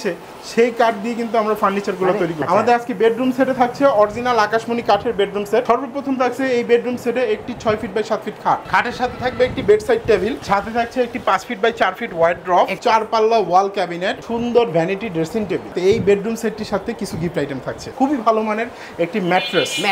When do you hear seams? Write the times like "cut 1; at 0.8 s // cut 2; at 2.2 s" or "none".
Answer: cut 1; at 2.4 s // cut 2; at 5.6 s // cut 3; at 8.6 s // cut 4; at 10.4 s // cut 5; at 12.7 s // cut 6; at 14.2 s // cut 7; at 15.7 s // cut 8; at 17.9 s